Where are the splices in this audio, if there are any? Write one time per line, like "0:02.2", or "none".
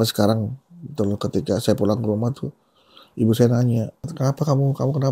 0:04.1